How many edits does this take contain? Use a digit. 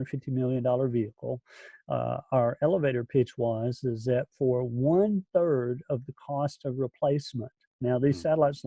0